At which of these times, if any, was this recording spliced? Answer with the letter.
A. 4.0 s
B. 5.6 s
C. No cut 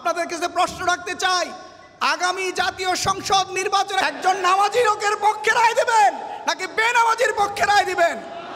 A